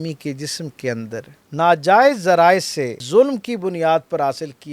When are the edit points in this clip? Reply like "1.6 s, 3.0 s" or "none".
1.4 s, 3.0 s